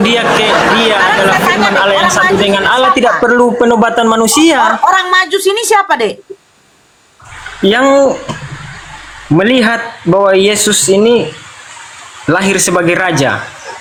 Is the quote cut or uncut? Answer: uncut